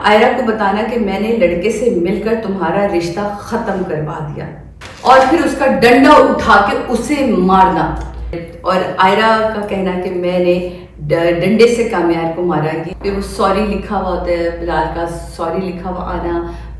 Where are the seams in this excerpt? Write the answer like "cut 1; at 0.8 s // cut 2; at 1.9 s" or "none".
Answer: cut 1; at 8.4 s // cut 2; at 12.8 s